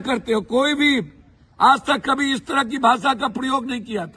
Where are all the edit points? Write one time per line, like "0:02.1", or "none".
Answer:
none